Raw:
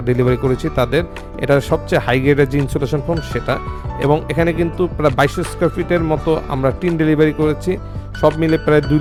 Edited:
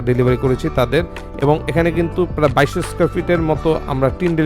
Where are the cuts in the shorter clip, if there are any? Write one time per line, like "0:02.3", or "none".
0:01.2

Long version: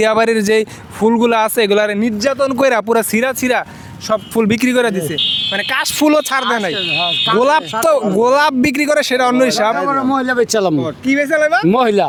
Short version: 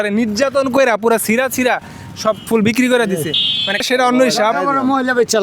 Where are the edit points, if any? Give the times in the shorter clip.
0:03.9

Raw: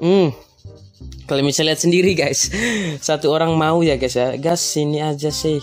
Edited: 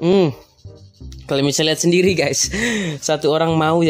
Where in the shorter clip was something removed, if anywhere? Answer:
none

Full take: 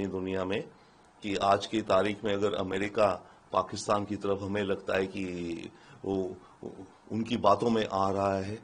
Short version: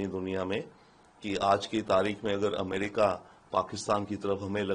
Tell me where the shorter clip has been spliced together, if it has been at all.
none

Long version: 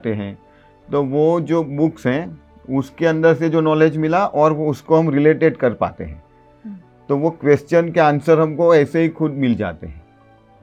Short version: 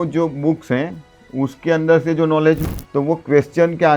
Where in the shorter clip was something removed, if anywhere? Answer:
0:02.6

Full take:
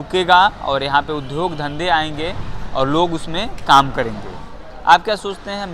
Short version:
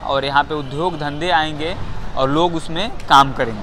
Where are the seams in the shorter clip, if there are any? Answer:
none

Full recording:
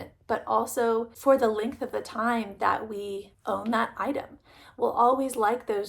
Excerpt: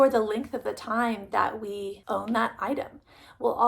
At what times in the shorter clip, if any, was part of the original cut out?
0:02.0

